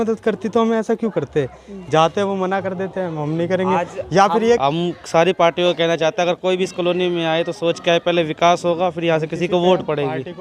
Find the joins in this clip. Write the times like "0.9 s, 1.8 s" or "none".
4.6 s